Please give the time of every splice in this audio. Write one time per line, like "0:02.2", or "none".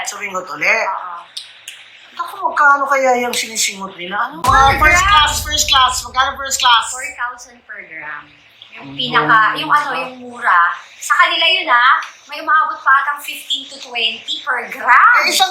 0:04.4

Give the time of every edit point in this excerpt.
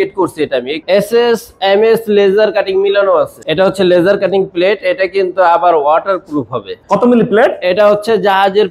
0:00.8
0:03.3
0:06.8

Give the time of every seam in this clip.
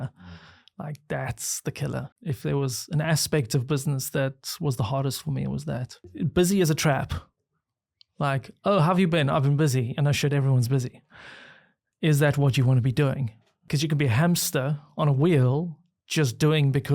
0:02.1
0:06.0
0:13.6

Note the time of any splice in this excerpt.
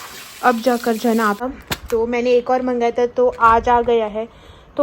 0:01.4

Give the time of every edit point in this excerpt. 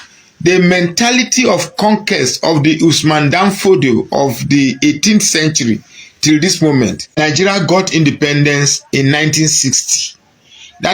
0:07.2

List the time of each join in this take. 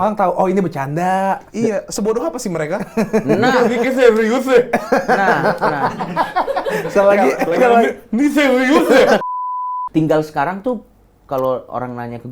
0:09.2

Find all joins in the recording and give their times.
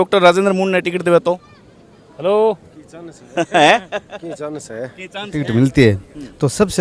0:05.4

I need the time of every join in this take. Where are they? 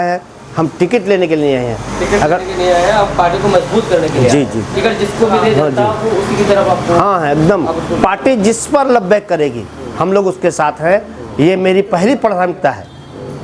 none

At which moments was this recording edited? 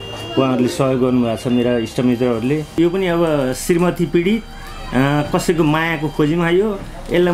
0:02.8

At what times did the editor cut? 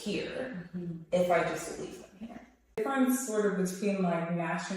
0:02.8

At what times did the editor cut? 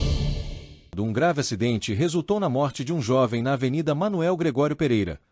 0:00.9

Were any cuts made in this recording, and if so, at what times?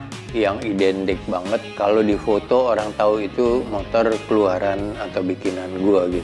0:01.7

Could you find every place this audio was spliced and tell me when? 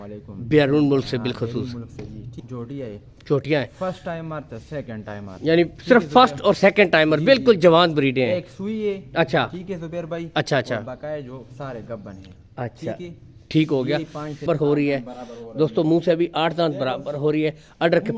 0:02.4
0:14.4

